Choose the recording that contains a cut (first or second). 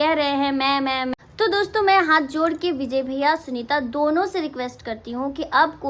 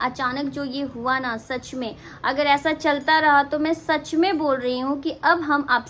first